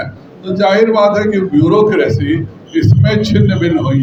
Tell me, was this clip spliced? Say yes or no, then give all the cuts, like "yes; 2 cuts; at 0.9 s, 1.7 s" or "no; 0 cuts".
no; 0 cuts